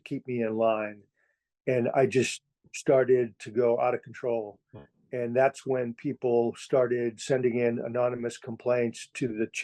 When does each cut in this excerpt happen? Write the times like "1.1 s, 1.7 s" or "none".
7.2 s

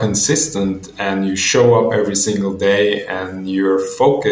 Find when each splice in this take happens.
none

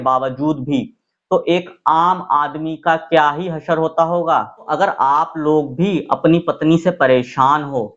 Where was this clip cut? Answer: 4.7 s

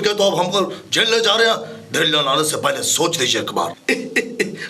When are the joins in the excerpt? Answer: 3.8 s

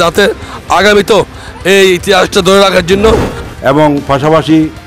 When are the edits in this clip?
3.3 s

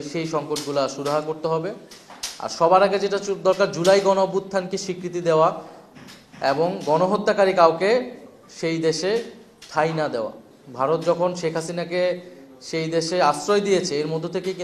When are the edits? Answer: none

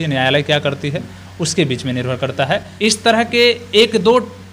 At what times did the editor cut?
2.7 s

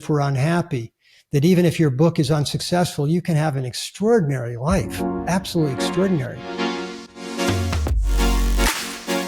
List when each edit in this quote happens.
6.4 s

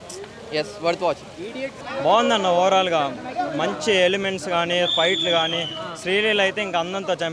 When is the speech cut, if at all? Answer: 1.8 s

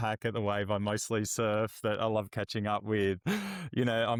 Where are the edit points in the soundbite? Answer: none

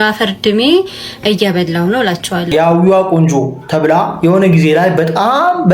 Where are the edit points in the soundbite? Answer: 2.5 s

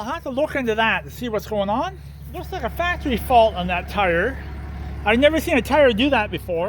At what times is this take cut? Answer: 2.6 s

